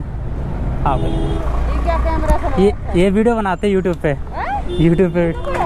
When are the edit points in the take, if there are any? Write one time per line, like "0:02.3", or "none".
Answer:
0:01.4